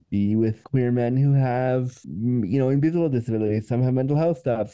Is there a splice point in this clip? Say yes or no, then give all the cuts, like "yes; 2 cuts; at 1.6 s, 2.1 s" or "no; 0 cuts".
no; 0 cuts